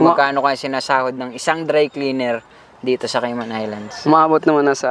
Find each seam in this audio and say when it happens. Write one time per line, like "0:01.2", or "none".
none